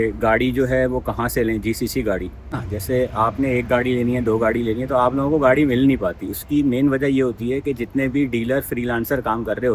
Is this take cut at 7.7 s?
no; 1 cut; at 2.7 s

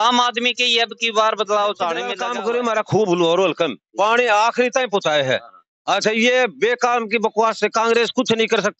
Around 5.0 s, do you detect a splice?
no; 1 cut; at 2.2 s

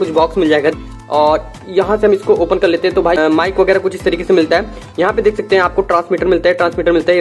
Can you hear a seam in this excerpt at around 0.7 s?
yes; 2 cuts; at 0.7 s, 3.2 s

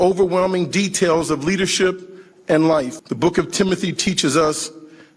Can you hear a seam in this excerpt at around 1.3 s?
no; 1 cut; at 3.0 s

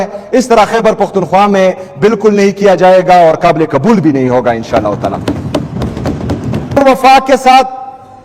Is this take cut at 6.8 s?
yes; 1 cut; at 6.8 s

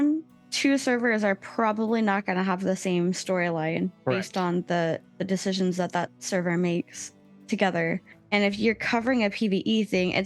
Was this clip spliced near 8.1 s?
yes; 1 cut; at 8.1 s

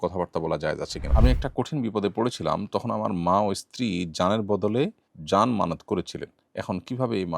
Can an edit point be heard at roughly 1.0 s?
yes; 1 cut; at 1.0 s

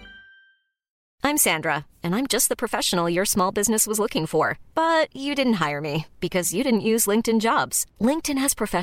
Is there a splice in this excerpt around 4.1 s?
no; 1 cut; at 1.1 s

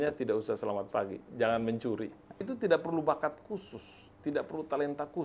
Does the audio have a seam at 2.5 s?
yes; 1 cut; at 2.5 s

